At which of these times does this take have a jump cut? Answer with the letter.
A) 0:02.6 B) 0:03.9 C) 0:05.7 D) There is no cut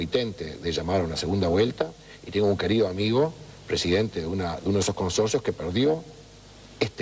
A